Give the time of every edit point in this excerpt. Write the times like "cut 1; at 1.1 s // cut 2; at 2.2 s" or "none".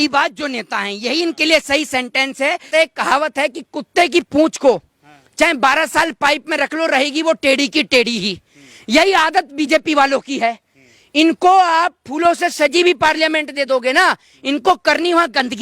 cut 1; at 2.7 s